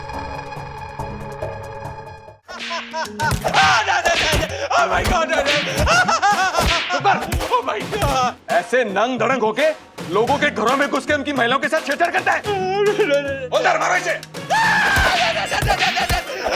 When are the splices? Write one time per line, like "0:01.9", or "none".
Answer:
0:02.6

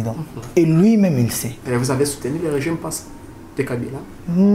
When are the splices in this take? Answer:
0:01.6

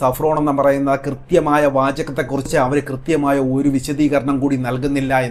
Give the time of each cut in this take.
none

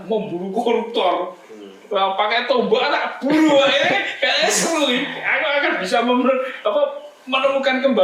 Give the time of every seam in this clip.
none

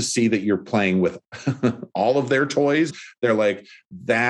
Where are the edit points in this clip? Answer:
0:01.2
0:02.9

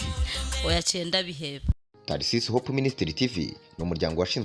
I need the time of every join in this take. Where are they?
0:01.8

